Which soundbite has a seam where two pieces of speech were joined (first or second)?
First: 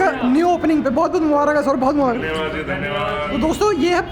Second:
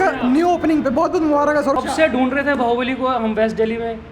second